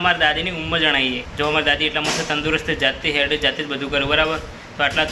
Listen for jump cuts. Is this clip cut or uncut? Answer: cut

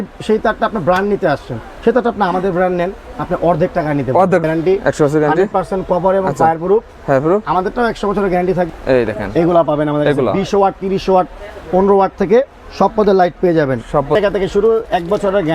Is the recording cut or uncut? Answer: cut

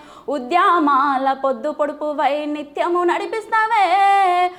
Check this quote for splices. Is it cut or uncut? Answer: uncut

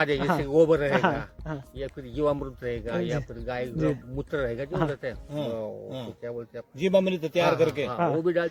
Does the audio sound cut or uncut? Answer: uncut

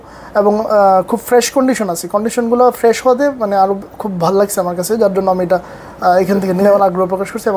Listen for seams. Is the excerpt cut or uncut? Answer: uncut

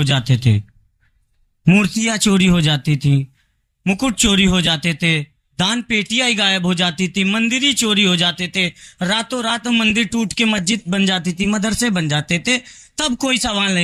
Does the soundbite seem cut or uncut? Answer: uncut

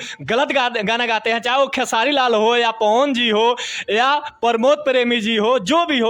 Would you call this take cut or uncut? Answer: uncut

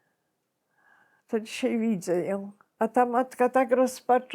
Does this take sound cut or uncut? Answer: cut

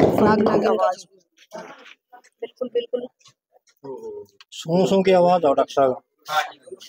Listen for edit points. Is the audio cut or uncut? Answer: uncut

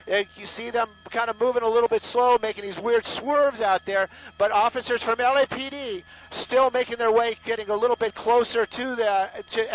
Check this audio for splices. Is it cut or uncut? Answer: uncut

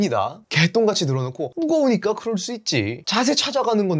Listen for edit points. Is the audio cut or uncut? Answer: cut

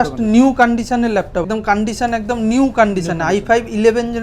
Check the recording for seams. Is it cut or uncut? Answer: cut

